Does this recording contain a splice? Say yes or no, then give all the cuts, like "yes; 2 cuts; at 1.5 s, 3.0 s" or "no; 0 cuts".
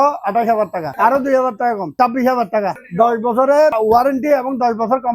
yes; 4 cuts; at 0.9 s, 1.9 s, 2.8 s, 3.8 s